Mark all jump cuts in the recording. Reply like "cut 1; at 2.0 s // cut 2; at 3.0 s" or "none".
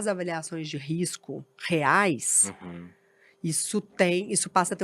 none